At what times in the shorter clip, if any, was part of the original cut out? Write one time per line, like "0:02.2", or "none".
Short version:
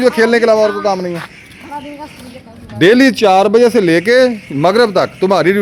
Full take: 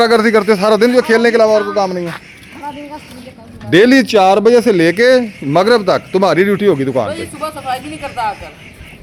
none